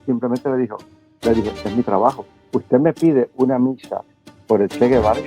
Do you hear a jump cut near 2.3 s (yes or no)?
yes